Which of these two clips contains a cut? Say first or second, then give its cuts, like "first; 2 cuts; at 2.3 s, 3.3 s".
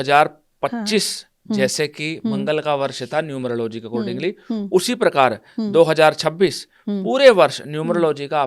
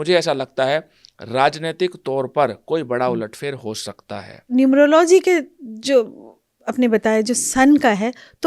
second; 1 cut; at 4.5 s